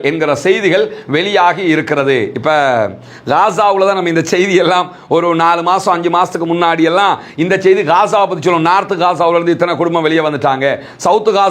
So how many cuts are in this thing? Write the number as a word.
one